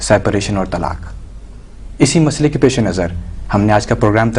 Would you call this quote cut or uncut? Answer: cut